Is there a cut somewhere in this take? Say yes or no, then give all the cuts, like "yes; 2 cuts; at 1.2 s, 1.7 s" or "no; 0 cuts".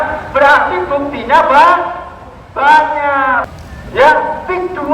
yes; 1 cut; at 3.5 s